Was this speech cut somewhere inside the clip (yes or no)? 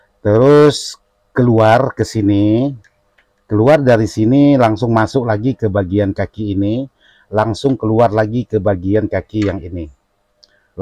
no